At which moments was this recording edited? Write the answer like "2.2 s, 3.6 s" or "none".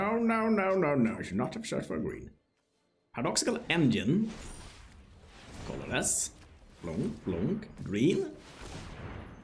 none